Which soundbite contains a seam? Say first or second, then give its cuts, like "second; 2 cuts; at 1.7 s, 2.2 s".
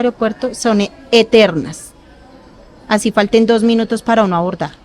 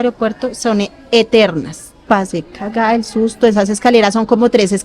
second; 1 cut; at 2.0 s